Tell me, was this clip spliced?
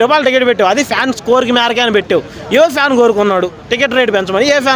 no; 0 cuts

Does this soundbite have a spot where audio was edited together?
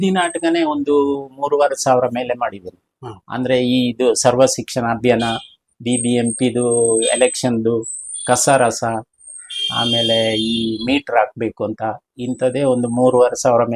no; 0 cuts

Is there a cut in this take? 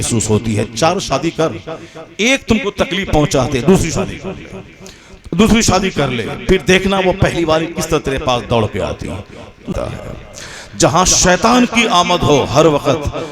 yes; 1 cut; at 9.7 s

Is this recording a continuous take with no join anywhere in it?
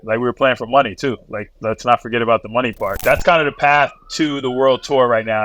no; 1 cut; at 3.0 s

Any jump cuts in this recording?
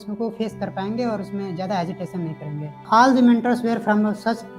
yes; 1 cut; at 2.7 s

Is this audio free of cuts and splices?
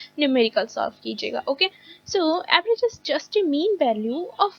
yes; 0 cuts

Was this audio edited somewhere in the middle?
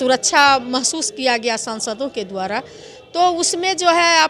no; 0 cuts

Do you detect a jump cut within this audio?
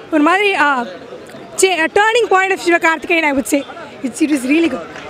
no; 0 cuts

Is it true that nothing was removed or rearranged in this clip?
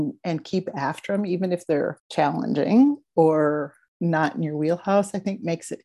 no; 2 cuts; at 2.0 s, 3.8 s

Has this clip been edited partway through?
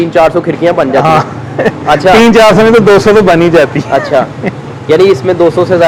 no; 0 cuts

